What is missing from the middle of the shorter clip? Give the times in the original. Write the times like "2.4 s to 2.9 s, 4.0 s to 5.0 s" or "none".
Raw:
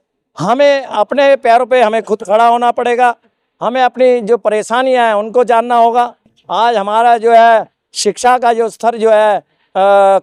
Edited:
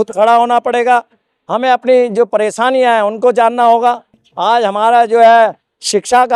none